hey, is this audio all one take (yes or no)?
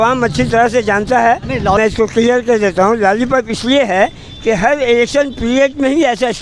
no